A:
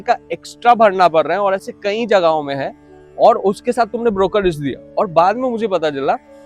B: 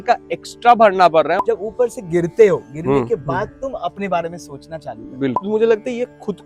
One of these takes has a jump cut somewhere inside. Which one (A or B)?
B